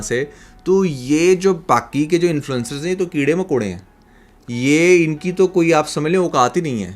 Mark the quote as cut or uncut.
uncut